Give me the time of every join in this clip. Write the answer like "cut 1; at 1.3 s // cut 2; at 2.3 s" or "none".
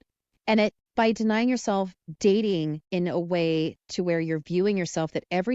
cut 1; at 0.8 s // cut 2; at 2.0 s // cut 3; at 2.8 s